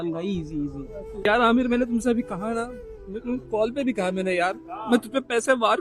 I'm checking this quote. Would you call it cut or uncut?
cut